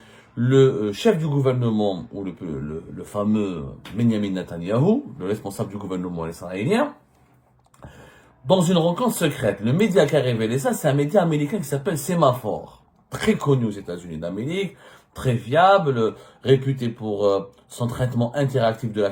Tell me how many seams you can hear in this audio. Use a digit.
0